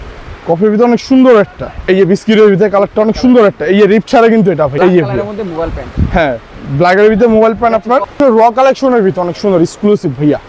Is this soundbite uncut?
no; 3 cuts; at 1.7 s, 4.7 s, 8.1 s

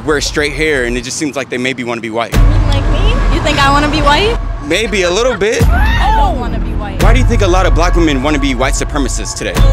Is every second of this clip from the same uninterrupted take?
no; 1 cut; at 6.9 s

